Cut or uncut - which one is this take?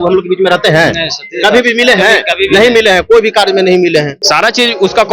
cut